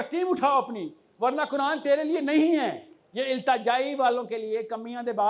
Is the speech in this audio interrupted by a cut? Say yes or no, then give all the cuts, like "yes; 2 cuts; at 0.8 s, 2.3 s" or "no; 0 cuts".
no; 0 cuts